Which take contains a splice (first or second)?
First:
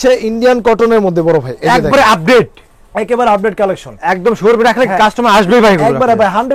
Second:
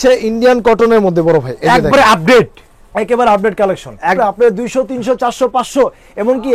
second